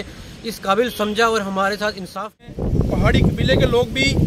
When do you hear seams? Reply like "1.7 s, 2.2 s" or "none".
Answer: 2.3 s